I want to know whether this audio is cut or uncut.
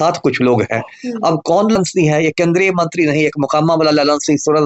cut